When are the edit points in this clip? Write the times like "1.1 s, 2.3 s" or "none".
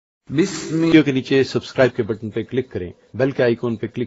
0.9 s